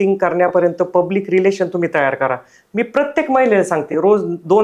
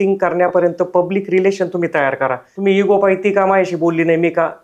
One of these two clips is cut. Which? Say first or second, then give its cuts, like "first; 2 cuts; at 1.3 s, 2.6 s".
second; 1 cut; at 2.5 s